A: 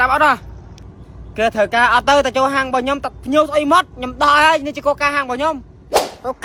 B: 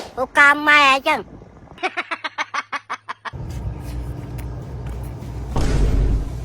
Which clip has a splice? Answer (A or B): B